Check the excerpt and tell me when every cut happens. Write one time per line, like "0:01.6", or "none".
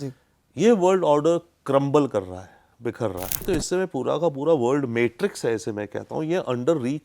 0:03.4